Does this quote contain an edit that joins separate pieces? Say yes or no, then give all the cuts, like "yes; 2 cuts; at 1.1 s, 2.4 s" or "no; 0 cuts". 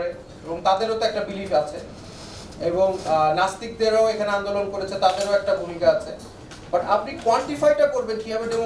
no; 0 cuts